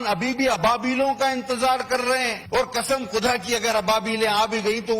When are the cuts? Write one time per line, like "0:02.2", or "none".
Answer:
0:02.4